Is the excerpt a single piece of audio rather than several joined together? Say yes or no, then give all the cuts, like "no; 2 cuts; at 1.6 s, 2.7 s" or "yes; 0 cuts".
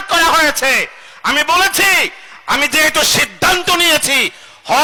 yes; 0 cuts